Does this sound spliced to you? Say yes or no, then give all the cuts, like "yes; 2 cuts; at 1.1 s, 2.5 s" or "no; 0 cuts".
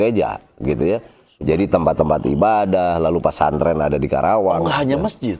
no; 0 cuts